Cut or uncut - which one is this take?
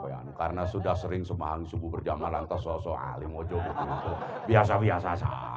uncut